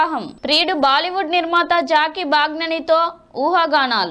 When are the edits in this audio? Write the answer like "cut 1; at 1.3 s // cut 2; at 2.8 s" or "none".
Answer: none